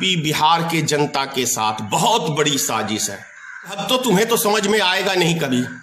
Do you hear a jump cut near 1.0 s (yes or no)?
no